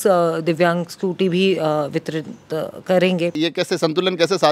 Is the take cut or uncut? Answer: cut